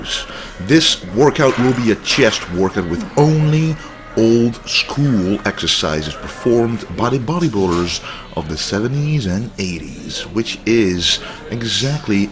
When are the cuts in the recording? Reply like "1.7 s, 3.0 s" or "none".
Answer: none